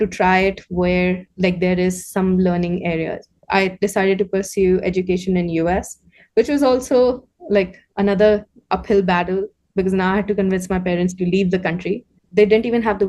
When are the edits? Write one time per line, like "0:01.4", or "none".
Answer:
0:12.1